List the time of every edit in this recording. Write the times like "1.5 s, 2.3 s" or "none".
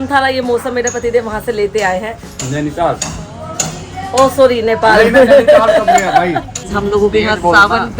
6.7 s